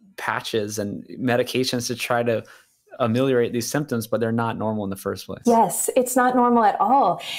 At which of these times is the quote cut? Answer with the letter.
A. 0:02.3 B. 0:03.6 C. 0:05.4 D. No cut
D